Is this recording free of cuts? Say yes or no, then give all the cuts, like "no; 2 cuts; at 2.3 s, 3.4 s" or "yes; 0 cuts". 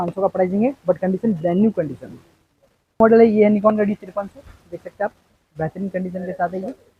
no; 1 cut; at 3.0 s